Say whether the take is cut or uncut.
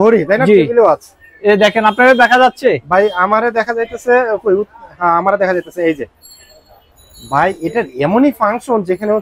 uncut